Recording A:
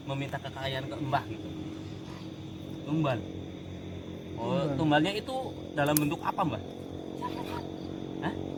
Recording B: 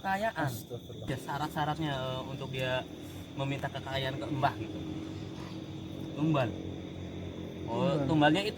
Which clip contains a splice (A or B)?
B